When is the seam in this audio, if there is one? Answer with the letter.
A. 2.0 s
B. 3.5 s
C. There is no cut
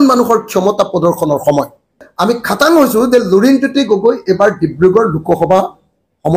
A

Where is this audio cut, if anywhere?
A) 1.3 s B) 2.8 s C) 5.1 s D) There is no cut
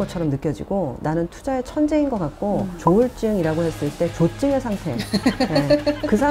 B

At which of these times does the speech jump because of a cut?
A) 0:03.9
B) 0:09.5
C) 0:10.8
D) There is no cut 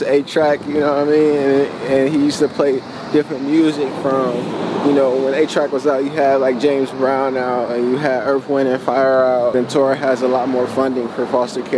B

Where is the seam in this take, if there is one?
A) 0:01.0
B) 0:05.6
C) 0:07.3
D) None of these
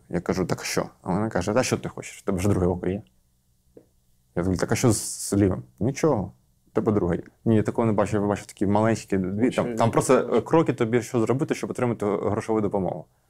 C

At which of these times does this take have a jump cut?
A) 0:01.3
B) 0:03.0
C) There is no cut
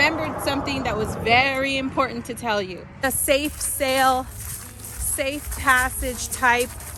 B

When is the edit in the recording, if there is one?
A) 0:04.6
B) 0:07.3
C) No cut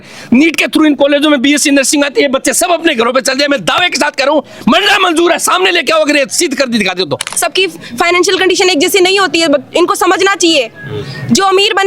B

